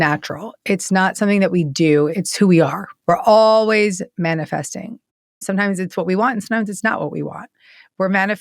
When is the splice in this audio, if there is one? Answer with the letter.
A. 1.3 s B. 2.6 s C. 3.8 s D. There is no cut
B